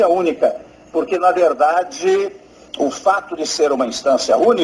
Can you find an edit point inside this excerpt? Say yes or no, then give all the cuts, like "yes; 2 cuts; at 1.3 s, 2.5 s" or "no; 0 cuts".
no; 0 cuts